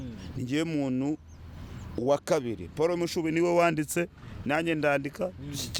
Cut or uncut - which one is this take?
uncut